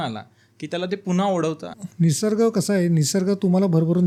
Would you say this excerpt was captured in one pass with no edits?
yes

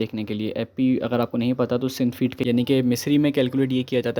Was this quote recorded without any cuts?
no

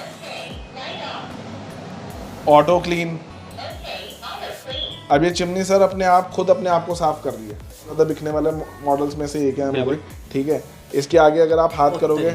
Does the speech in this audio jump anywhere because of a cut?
yes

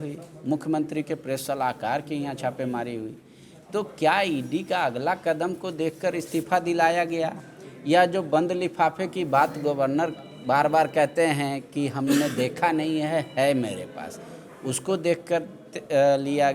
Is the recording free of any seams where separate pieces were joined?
yes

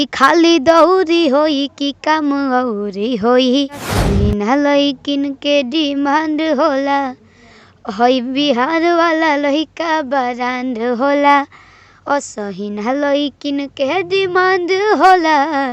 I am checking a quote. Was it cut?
yes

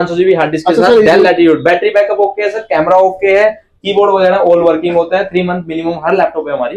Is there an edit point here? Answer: no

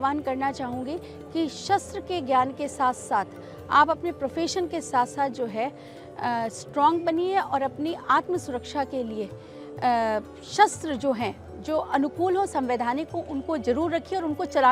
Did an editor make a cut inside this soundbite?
no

